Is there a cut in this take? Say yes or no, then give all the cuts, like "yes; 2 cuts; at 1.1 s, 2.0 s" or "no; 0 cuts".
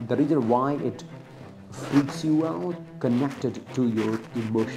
yes; 1 cut; at 2.9 s